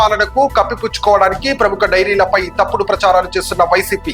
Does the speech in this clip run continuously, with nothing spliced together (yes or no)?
yes